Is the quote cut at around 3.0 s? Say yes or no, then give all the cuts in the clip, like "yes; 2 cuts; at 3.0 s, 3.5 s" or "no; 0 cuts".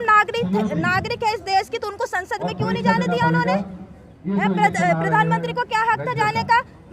no; 0 cuts